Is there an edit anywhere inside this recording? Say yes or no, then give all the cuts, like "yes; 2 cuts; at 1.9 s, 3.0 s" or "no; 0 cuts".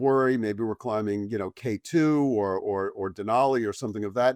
no; 0 cuts